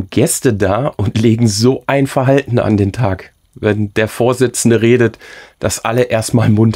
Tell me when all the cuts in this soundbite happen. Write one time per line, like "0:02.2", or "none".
none